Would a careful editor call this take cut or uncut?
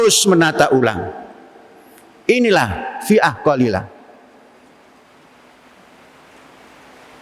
uncut